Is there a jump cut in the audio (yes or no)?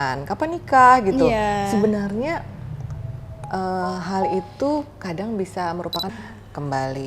yes